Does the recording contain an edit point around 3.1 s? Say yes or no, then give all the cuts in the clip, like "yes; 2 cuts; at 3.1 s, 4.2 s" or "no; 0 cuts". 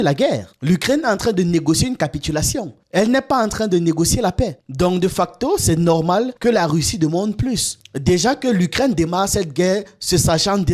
no; 1 cut; at 7.8 s